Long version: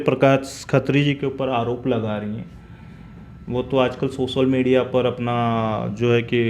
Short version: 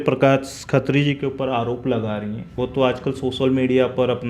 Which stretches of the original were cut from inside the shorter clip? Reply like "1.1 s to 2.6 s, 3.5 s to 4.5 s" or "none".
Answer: 2.5 s to 3.4 s